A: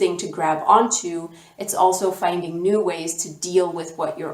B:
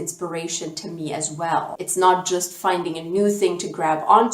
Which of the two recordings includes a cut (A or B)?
B